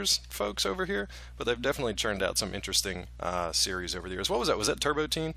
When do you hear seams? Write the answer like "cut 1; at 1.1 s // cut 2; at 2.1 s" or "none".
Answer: cut 1; at 1.5 s